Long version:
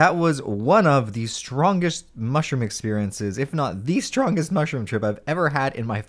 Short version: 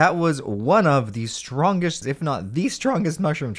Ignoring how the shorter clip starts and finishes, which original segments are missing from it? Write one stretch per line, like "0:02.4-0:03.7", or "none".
0:02.0-0:03.3